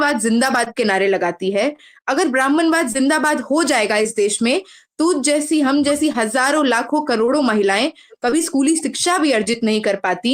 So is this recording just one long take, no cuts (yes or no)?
yes